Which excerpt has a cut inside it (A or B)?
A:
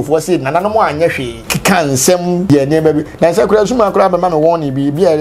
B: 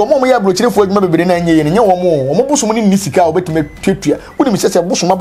A